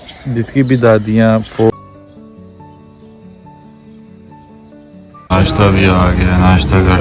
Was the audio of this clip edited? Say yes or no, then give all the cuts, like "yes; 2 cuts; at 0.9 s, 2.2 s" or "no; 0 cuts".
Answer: yes; 2 cuts; at 1.7 s, 5.3 s